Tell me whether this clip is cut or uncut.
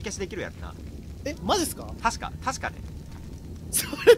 uncut